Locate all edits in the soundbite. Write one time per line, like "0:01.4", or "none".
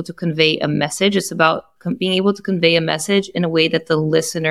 none